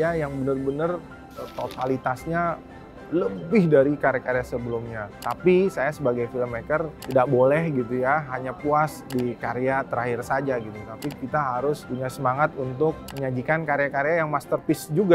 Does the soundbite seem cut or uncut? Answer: uncut